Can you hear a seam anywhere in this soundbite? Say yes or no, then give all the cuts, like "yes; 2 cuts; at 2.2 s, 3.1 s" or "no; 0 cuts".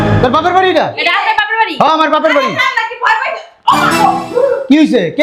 no; 0 cuts